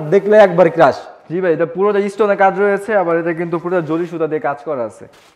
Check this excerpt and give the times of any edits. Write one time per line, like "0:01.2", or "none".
none